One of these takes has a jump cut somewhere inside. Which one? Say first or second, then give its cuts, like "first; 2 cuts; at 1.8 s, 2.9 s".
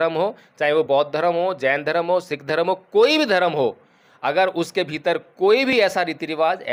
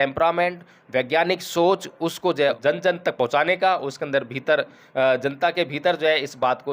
second; 1 cut; at 2.6 s